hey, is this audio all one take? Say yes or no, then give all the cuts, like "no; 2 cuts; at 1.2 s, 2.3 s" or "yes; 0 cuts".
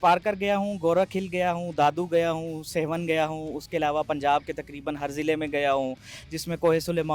yes; 0 cuts